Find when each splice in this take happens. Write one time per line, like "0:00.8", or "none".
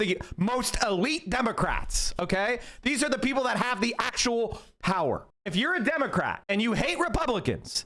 none